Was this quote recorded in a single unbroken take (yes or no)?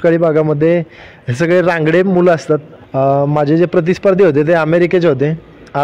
no